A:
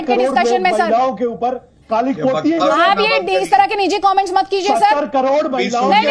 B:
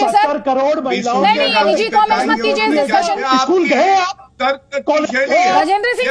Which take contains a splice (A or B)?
B